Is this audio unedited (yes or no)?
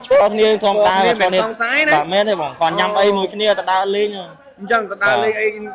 yes